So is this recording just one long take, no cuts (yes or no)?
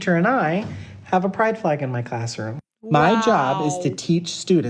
yes